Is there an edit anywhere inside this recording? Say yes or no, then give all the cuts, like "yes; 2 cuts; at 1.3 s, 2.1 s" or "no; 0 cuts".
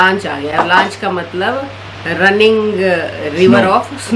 no; 0 cuts